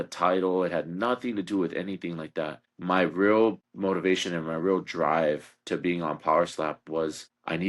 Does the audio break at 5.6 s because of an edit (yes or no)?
no